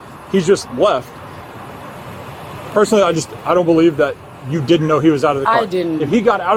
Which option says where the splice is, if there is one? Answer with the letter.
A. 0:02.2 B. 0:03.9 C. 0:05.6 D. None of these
D